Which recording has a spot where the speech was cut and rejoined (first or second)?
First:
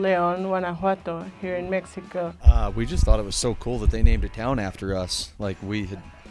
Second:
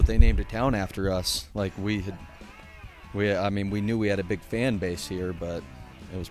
first